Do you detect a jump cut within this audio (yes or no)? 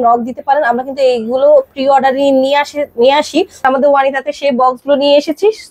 yes